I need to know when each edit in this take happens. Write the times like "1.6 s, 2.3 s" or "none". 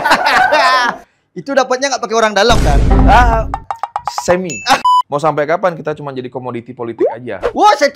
4.8 s